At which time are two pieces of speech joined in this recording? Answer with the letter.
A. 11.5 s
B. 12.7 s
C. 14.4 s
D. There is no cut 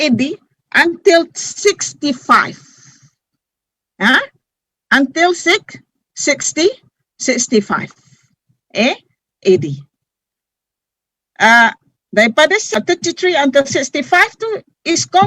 B